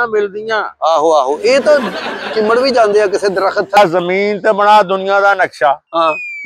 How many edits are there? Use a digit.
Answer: 1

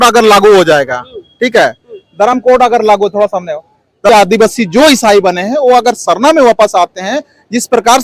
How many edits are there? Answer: 1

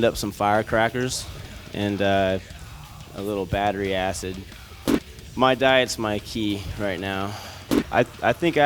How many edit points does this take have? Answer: 1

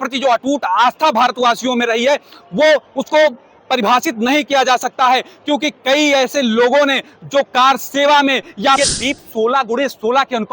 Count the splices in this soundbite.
1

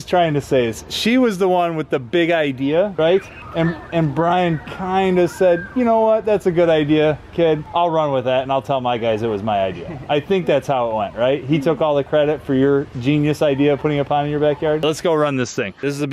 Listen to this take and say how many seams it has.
1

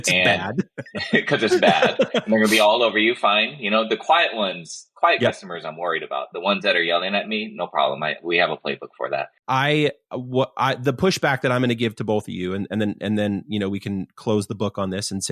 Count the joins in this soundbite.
1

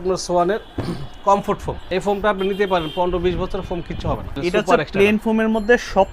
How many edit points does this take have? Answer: 2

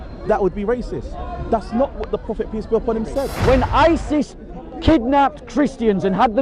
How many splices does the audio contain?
1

